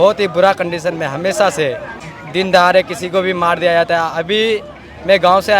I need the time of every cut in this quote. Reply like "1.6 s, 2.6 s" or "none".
2.2 s